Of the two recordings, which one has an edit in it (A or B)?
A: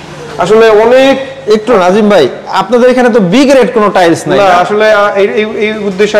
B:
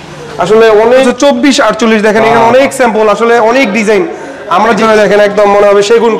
B